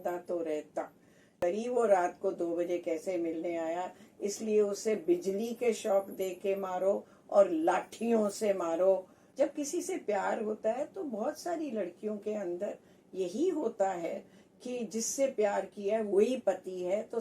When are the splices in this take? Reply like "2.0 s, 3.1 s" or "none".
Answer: 1.6 s, 9.2 s